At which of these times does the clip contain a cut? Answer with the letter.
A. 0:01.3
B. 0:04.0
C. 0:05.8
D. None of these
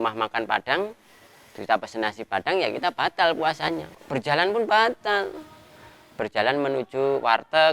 B